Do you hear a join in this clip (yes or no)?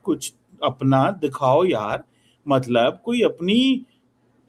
no